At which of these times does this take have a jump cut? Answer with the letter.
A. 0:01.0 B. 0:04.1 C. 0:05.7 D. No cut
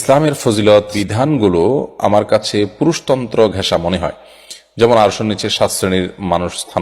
A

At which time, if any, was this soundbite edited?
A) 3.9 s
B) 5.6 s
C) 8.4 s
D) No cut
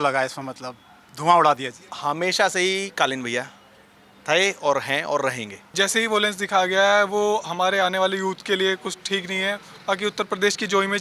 B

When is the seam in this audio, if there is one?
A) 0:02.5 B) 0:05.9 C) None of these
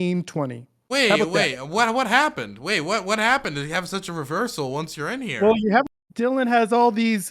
B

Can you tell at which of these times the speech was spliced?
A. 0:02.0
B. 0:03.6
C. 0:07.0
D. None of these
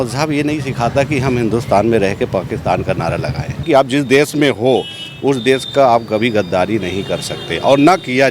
B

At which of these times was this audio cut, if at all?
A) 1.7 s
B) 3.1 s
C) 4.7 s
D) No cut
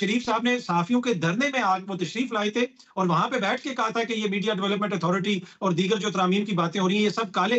D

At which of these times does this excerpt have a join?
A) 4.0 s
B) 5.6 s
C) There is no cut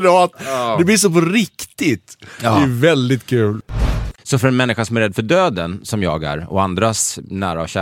A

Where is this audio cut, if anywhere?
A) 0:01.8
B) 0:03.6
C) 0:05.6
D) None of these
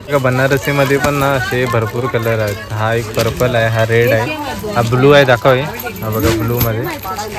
D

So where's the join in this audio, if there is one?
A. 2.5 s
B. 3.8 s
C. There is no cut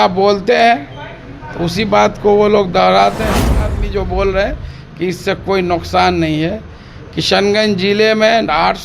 B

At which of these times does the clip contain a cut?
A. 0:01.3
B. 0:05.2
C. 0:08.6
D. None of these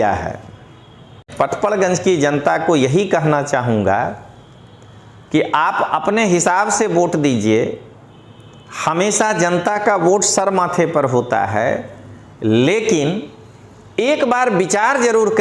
A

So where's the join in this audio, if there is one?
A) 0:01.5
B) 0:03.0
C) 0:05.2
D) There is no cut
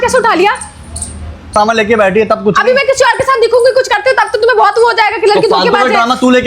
A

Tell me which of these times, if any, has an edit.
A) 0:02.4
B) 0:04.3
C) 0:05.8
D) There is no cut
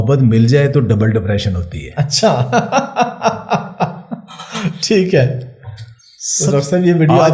D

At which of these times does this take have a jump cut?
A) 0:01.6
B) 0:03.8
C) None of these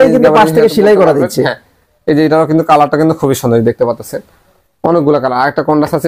C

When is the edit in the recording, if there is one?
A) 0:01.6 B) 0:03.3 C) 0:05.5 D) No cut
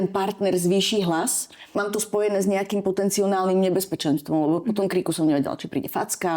A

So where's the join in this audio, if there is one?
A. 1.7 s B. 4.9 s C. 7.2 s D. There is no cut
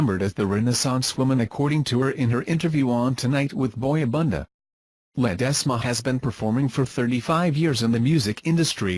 C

